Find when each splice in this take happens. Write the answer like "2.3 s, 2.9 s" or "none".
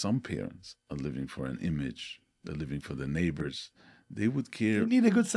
none

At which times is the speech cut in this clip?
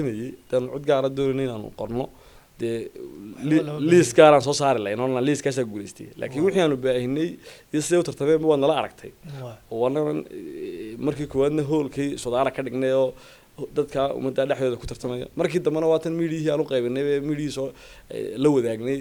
none

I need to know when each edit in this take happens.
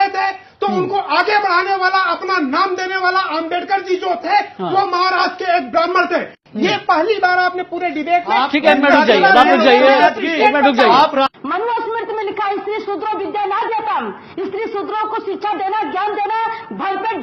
6.4 s, 11.3 s

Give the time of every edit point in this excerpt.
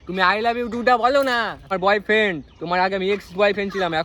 1.7 s

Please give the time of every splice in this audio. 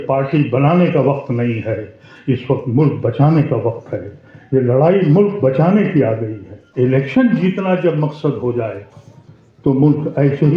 6.6 s

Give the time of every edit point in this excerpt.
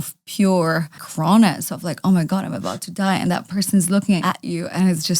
1.0 s, 4.2 s

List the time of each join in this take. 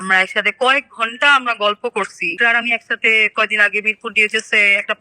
2.4 s

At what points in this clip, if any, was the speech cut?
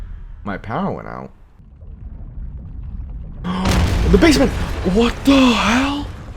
1.6 s

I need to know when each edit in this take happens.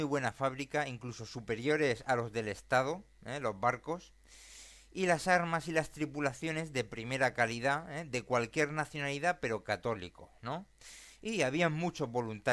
none

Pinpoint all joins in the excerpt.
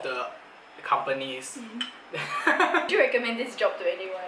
2.9 s

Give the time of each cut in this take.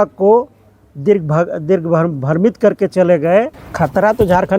3.6 s

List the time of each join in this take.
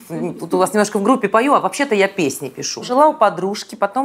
2.9 s

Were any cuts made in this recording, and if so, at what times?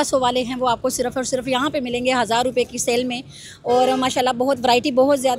none

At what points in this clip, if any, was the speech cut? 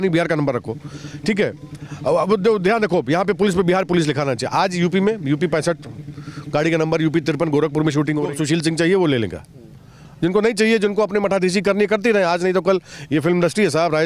8.3 s

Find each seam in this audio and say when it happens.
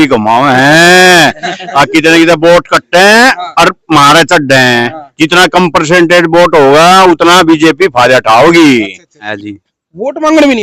9.2 s

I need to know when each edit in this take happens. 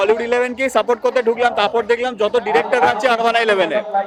none

